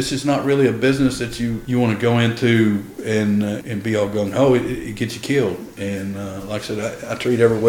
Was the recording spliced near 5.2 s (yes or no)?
no